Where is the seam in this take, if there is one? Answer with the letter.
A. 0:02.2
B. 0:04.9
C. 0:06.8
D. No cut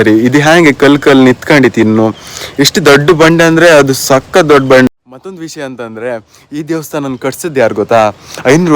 B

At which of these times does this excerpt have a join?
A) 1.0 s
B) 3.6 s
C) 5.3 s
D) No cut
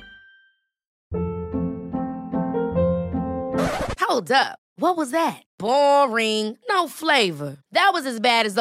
A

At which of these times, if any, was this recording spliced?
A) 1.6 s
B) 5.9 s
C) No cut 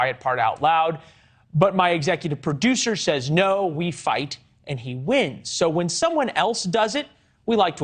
B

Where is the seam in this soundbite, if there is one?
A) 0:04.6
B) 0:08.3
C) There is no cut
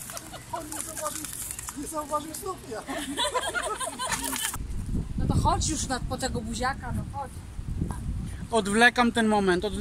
A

